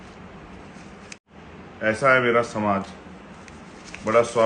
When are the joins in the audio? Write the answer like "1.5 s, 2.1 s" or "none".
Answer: 1.2 s